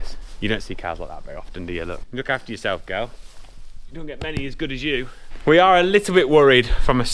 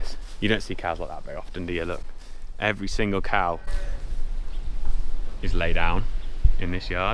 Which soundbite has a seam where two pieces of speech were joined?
first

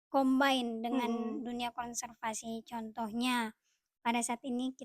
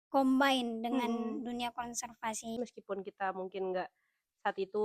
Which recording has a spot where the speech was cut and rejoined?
second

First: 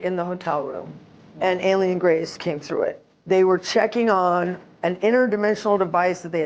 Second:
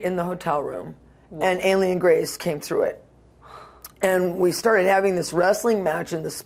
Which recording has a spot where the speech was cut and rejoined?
first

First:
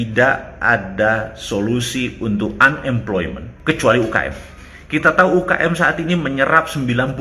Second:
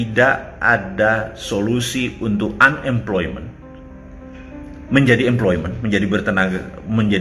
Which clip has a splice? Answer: first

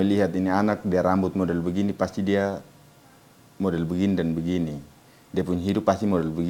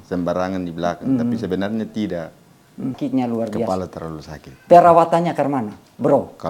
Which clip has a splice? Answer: second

